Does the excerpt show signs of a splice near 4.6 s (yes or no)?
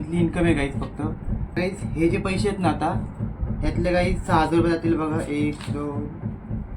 no